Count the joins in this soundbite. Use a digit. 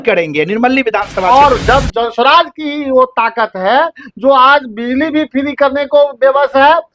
1